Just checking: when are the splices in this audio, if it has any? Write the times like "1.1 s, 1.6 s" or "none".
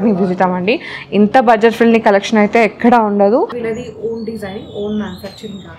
3.6 s